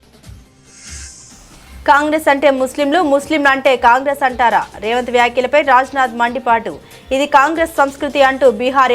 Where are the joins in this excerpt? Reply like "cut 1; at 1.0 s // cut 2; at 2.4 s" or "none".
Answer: cut 1; at 1.8 s